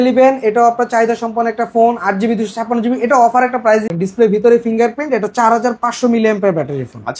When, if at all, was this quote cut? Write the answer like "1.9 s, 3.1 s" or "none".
3.9 s